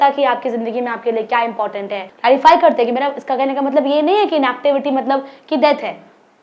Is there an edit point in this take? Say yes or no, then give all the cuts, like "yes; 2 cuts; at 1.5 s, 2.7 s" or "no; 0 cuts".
yes; 1 cut; at 2.0 s